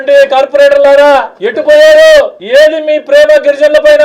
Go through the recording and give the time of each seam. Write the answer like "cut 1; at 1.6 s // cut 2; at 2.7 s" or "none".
cut 1; at 1.4 s // cut 2; at 2.4 s